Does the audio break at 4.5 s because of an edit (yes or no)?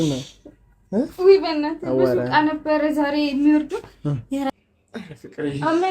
yes